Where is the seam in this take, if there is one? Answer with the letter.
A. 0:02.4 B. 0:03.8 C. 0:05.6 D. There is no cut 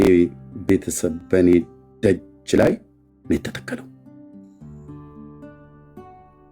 B